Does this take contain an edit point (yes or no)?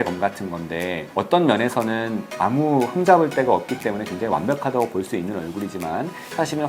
yes